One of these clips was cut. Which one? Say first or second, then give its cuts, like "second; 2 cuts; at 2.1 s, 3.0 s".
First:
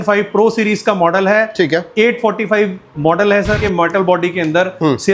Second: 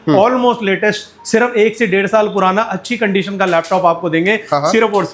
first; 1 cut; at 3.6 s